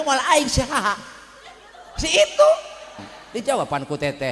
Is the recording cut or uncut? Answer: cut